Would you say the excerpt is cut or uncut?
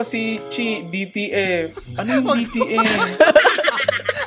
uncut